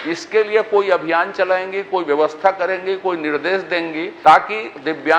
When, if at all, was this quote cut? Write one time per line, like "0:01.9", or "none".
0:04.1